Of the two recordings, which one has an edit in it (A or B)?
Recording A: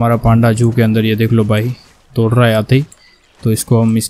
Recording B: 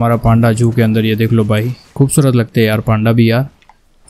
B